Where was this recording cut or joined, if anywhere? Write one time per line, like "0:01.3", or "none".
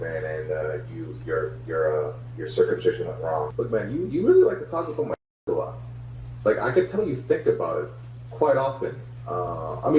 0:03.5